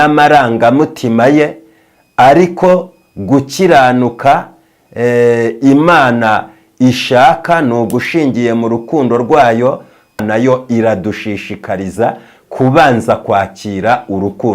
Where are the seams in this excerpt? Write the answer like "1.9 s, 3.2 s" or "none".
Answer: 10.2 s